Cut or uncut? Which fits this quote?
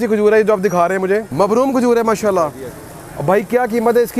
cut